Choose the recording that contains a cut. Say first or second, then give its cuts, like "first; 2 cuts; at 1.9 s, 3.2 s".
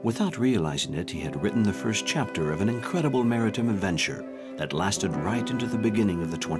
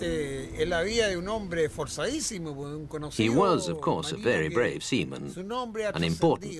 second; 1 cut; at 1.3 s